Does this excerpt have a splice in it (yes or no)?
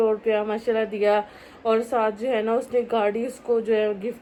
no